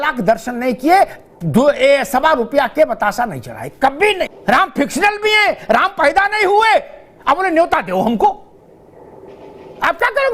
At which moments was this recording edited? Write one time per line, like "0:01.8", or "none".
0:04.4